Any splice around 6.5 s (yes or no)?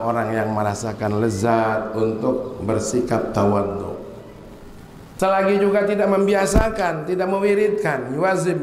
no